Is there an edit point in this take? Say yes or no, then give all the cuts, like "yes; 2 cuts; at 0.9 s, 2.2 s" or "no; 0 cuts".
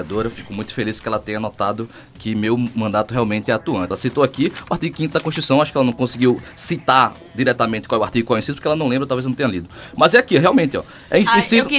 yes; 1 cut; at 3.9 s